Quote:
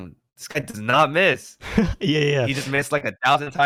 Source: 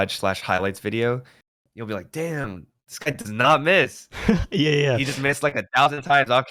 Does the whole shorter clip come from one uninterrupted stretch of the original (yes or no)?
yes